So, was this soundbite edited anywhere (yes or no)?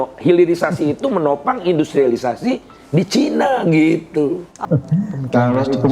yes